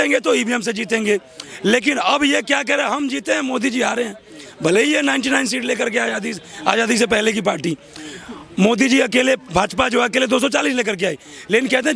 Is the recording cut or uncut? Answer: uncut